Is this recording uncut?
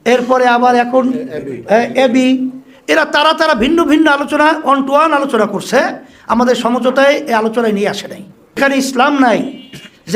no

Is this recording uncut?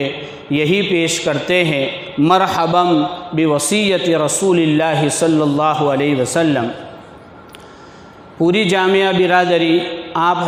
yes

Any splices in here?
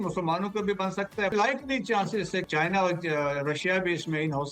yes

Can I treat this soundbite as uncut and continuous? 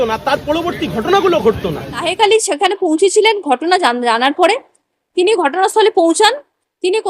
no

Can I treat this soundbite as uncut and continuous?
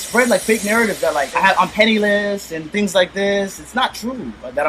no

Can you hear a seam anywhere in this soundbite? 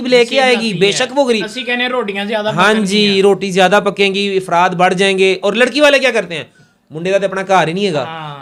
no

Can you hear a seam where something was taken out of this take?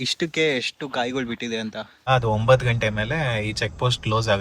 yes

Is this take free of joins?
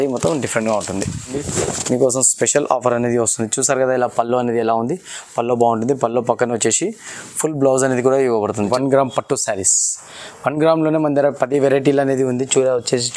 no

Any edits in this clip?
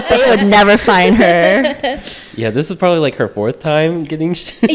no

